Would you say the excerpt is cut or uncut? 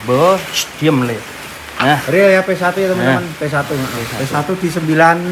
uncut